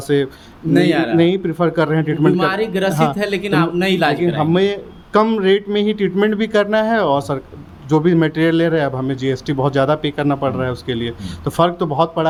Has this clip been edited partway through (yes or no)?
no